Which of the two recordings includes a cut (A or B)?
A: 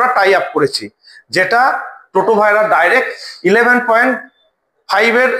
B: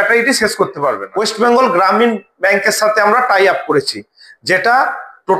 B